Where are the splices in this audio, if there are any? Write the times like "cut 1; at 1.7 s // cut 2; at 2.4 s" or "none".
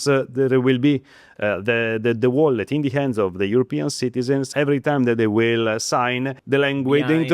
cut 1; at 4.5 s // cut 2; at 6.4 s